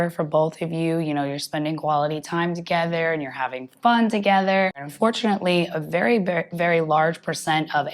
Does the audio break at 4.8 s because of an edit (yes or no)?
yes